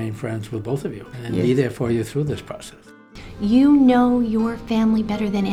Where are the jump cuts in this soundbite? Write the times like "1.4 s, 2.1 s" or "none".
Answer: 1.1 s, 3.1 s